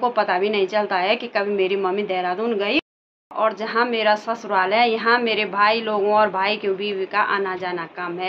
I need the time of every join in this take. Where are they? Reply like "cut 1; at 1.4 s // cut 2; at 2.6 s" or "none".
cut 1; at 2.8 s